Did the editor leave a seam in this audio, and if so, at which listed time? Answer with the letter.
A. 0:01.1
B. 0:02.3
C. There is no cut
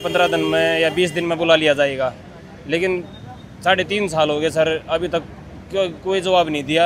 C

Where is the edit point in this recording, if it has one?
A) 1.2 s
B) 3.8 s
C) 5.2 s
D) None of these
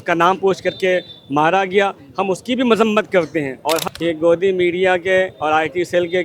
B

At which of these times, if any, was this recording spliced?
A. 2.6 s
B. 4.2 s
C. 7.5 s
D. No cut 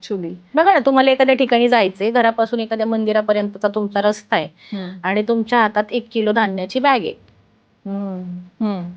D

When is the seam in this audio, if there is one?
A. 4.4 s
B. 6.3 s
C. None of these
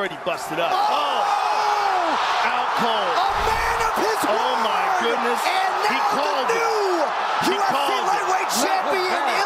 C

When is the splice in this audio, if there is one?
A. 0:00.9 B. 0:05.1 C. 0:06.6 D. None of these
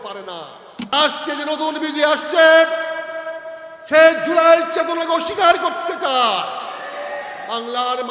A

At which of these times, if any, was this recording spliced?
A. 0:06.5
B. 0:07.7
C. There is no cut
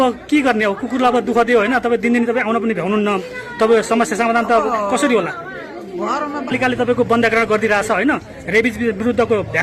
A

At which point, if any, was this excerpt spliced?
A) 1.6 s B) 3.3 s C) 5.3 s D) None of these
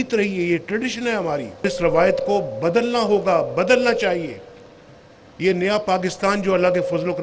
A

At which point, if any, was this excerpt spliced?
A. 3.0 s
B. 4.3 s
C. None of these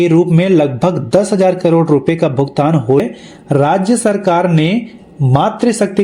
A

